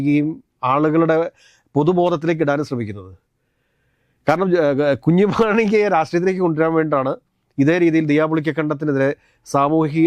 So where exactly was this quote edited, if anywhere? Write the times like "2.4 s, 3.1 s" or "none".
none